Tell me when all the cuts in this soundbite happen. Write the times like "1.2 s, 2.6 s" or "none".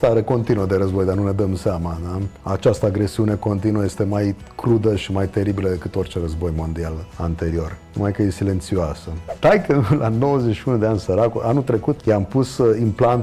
2.3 s, 7.5 s, 9.2 s, 12.0 s